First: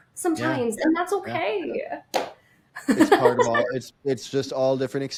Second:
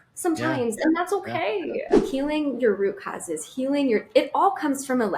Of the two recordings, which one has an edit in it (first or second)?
second